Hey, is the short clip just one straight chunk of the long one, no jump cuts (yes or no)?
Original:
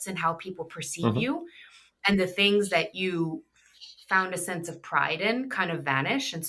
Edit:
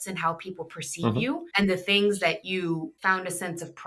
no